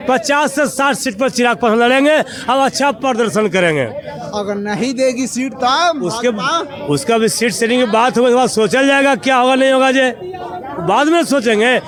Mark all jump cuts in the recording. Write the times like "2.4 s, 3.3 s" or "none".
none